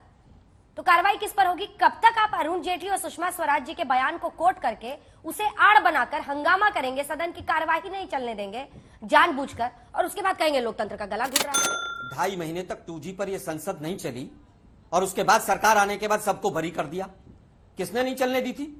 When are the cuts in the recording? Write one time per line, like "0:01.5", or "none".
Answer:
none